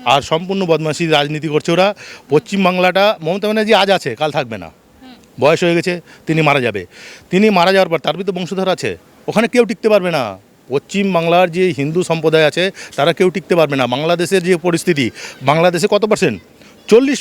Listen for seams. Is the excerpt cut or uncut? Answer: uncut